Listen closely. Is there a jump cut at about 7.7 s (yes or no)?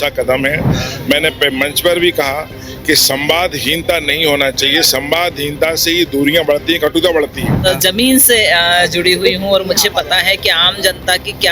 yes